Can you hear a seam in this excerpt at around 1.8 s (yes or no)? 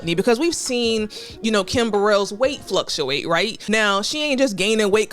no